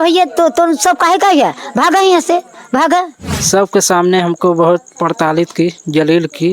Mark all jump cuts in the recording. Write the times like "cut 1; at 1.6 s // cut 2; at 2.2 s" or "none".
cut 1; at 3.3 s